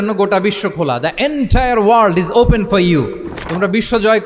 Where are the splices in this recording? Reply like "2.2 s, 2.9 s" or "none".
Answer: none